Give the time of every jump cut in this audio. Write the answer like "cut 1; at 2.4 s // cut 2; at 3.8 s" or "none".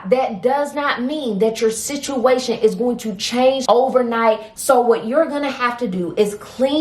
cut 1; at 3.6 s // cut 2; at 4.5 s